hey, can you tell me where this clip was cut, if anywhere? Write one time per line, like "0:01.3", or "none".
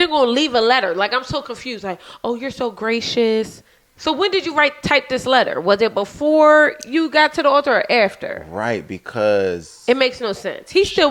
none